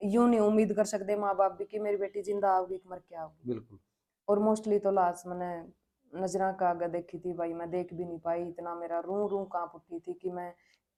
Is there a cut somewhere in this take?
no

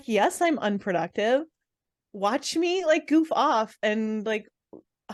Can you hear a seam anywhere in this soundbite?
no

